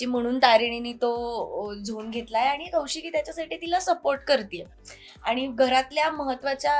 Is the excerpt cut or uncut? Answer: uncut